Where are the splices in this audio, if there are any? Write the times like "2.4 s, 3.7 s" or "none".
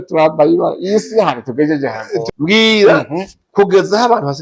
2.1 s